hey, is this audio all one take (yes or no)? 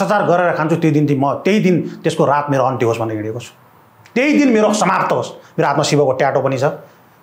yes